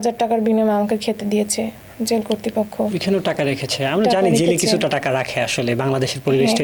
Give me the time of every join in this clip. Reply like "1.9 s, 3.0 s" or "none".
none